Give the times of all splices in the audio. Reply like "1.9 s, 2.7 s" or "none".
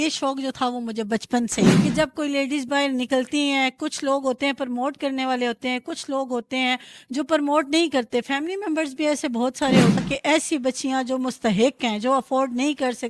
1.8 s, 10.0 s